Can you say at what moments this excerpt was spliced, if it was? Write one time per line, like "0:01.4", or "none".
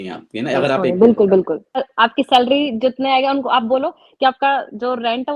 0:01.9